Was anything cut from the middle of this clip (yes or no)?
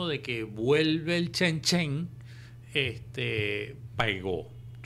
no